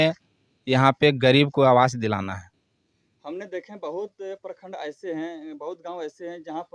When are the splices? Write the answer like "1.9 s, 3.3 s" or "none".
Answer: none